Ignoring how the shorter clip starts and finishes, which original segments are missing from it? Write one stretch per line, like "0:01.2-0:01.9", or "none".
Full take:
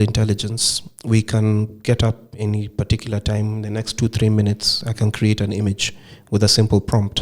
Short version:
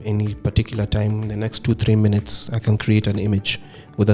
none